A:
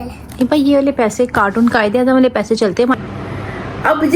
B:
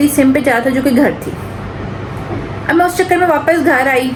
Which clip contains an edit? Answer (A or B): A